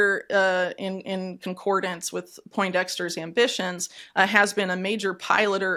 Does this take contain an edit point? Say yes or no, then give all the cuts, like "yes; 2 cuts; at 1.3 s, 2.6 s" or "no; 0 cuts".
no; 0 cuts